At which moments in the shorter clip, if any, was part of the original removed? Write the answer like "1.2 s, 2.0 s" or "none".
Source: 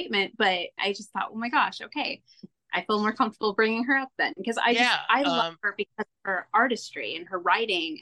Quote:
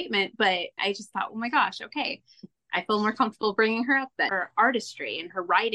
4.3 s